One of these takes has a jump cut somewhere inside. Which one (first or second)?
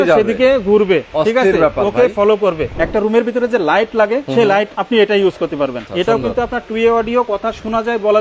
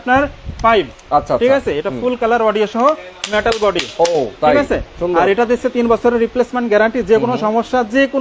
first